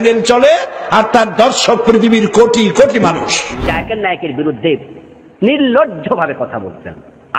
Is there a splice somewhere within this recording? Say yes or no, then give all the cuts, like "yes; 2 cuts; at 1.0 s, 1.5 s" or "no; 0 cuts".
yes; 1 cut; at 3.6 s